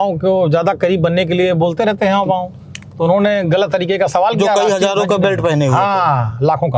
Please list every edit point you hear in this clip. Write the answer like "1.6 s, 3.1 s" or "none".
none